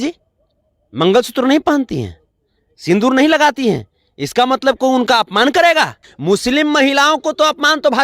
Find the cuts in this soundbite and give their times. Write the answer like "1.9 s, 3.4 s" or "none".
6.0 s